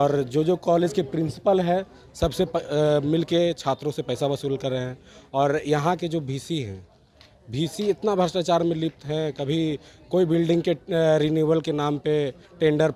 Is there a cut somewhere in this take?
no; 0 cuts

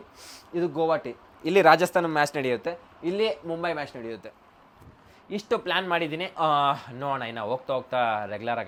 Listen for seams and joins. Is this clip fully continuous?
yes; 0 cuts

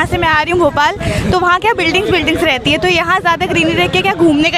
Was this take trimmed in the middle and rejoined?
no; 0 cuts

